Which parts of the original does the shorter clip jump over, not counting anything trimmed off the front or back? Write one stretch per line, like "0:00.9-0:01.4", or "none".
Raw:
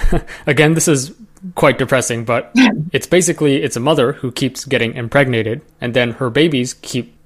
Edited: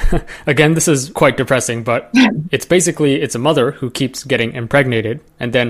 0:01.1-0:01.5